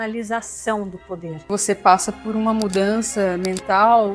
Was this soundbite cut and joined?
yes; 1 cut; at 1.5 s

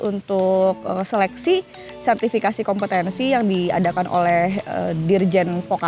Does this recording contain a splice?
no; 0 cuts

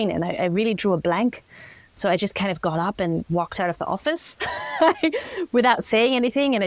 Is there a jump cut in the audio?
no; 0 cuts

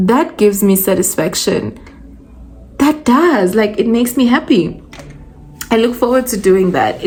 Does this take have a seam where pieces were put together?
no; 0 cuts

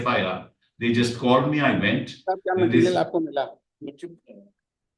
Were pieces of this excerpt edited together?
no; 0 cuts

